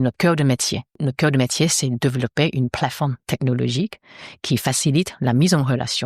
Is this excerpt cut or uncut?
cut